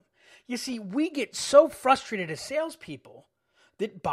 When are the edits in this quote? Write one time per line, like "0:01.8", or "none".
none